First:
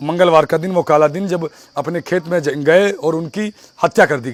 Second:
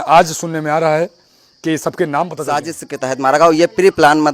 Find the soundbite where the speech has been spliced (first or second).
second